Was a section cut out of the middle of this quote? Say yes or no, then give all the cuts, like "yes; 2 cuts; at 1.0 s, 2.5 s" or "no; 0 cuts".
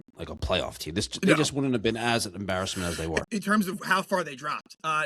yes; 1 cut; at 3.3 s